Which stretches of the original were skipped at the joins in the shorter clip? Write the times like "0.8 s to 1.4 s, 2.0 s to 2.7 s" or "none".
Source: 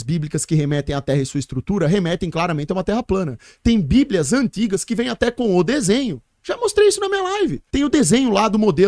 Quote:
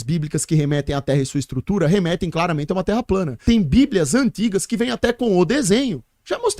3.3 s to 3.5 s